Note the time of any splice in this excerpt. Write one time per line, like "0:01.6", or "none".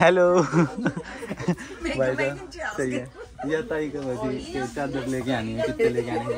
none

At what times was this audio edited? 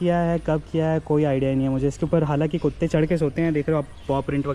none

